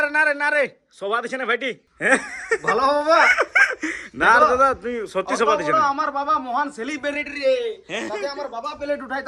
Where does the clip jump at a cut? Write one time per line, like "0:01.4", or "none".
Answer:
0:01.9